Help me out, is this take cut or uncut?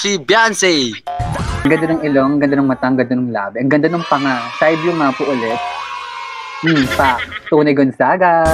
cut